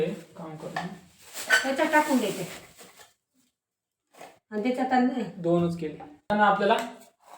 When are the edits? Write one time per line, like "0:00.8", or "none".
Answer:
0:06.3